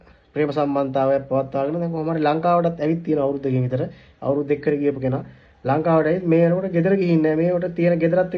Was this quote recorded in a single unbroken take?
yes; 0 cuts

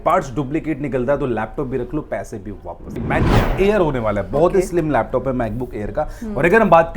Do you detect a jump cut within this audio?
yes; 1 cut; at 3.1 s

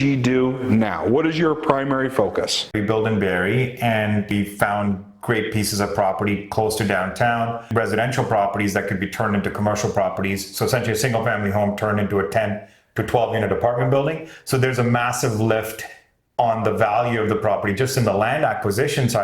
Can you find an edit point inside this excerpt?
yes; 3 cuts; at 2.8 s, 4.3 s, 7.6 s

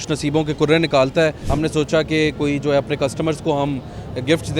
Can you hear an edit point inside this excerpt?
yes; 1 cut; at 1.4 s

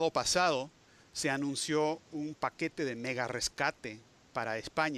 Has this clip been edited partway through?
yes; 1 cut; at 3.8 s

